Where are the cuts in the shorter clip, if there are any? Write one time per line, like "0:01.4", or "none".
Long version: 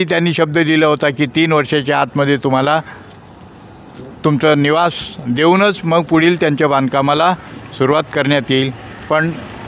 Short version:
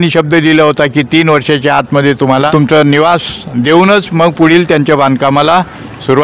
0:02.5